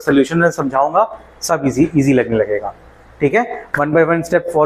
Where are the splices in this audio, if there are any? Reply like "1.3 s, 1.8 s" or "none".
none